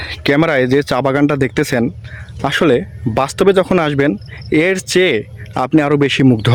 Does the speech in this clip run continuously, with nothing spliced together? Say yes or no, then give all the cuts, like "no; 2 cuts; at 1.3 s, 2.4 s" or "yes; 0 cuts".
yes; 0 cuts